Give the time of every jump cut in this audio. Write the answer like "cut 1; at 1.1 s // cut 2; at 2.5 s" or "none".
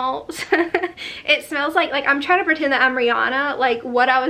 none

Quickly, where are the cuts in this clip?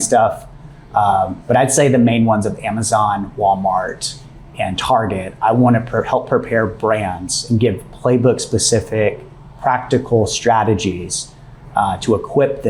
none

